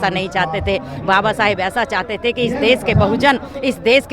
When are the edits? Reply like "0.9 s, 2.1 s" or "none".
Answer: none

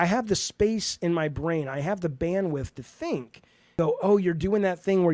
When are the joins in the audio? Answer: 3.8 s

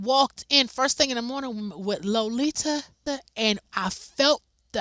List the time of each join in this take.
3.0 s

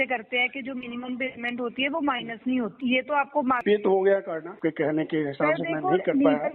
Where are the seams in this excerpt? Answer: 2.7 s, 3.6 s, 4.5 s

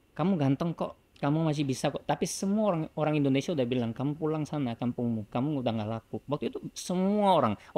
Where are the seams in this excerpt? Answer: none

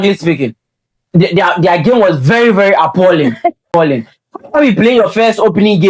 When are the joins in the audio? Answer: 3.7 s

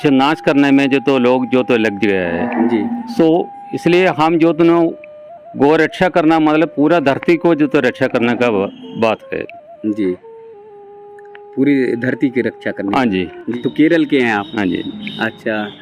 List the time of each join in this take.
13.4 s

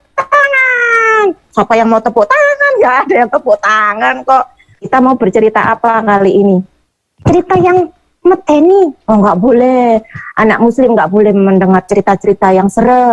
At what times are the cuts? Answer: 4.9 s

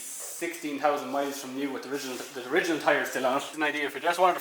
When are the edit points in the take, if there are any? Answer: 3.5 s

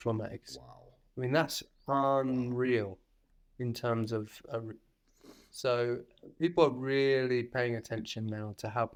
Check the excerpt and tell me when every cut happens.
none

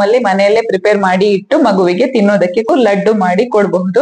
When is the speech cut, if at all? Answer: 2.7 s

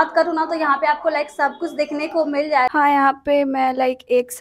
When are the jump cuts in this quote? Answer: 2.7 s

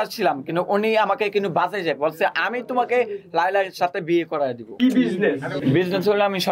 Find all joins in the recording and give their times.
4.7 s, 5.6 s

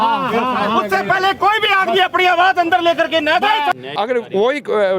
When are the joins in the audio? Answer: 3.7 s

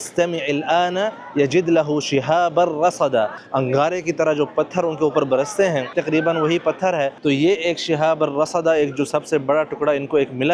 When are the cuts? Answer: 3.4 s, 5.9 s, 7.1 s

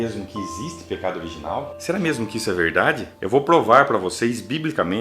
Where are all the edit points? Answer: 3.1 s

